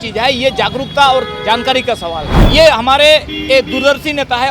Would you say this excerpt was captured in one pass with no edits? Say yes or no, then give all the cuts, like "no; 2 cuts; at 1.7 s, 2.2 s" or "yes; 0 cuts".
no; 1 cut; at 2.4 s